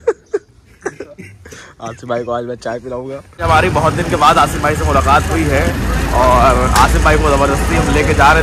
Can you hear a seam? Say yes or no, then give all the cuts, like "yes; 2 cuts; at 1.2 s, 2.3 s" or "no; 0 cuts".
no; 0 cuts